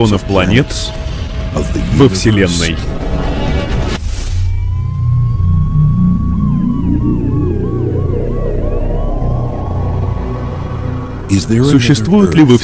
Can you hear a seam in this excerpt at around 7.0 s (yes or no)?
yes